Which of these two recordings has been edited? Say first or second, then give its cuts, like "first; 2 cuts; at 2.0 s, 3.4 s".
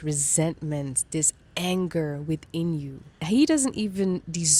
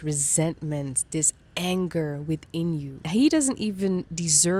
second; 1 cut; at 2.9 s